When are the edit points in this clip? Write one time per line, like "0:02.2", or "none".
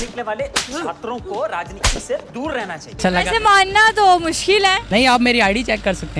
0:03.0
0:04.8